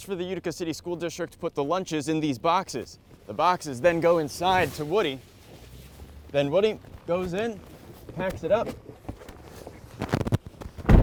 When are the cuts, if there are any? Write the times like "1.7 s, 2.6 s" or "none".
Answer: none